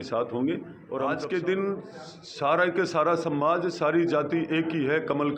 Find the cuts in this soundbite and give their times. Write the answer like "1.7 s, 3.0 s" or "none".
1.0 s